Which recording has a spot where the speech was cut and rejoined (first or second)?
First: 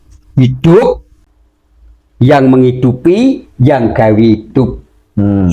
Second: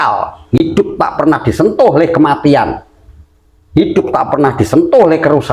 first